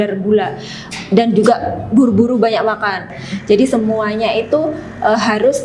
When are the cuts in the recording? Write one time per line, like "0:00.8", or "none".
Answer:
0:03.1